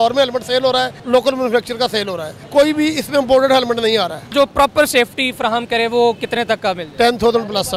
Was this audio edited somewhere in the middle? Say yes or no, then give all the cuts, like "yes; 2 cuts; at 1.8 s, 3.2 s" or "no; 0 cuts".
yes; 1 cut; at 4.3 s